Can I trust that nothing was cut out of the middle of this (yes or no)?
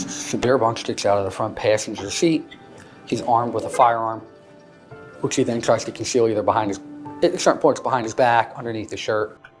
yes